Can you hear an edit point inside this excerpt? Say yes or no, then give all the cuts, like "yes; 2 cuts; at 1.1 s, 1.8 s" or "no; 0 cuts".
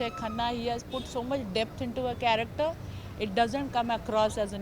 no; 0 cuts